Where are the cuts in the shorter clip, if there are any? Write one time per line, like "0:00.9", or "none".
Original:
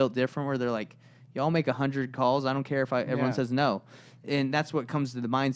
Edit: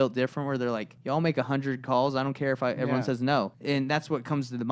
0:00.9
0:03.6